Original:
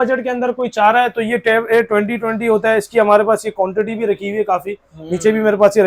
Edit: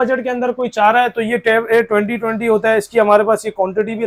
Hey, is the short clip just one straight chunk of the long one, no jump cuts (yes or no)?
yes